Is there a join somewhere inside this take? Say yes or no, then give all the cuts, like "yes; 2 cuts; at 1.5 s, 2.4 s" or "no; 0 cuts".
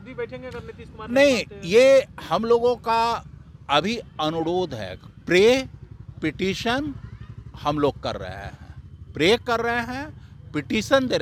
no; 0 cuts